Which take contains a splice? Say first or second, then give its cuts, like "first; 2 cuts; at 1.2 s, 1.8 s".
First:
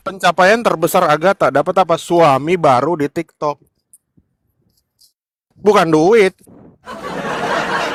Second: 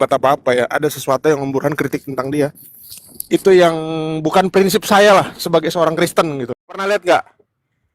second; 1 cut; at 6.6 s